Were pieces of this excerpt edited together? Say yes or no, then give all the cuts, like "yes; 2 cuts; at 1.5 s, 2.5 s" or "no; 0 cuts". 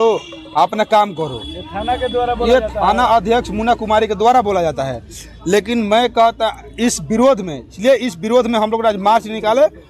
no; 0 cuts